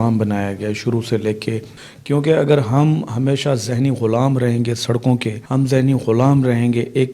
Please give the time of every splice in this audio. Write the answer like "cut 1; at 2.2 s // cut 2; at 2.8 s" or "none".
cut 1; at 1.7 s // cut 2; at 5.4 s